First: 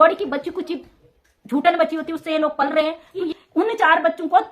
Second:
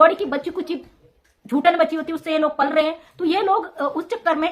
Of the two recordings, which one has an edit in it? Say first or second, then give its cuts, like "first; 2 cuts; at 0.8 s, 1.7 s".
first; 1 cut; at 3.2 s